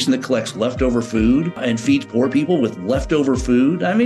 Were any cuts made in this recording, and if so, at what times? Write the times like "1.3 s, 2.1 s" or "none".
1.6 s